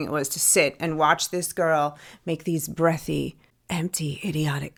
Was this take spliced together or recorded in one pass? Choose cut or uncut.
uncut